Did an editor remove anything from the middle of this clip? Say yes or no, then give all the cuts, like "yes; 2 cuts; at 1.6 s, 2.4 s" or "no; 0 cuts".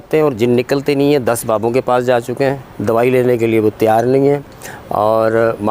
yes; 1 cut; at 2.7 s